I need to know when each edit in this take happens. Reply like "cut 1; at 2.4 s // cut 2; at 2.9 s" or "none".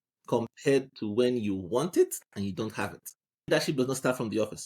cut 1; at 3.5 s